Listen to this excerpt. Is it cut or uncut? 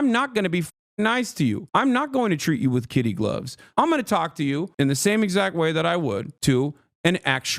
cut